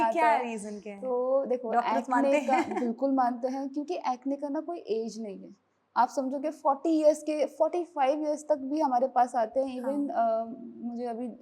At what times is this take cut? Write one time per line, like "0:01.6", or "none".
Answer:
none

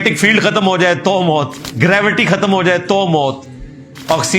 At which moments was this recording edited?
0:01.6

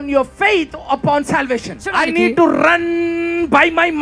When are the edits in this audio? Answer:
0:01.9

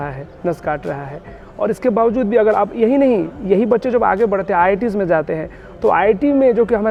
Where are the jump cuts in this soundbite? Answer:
none

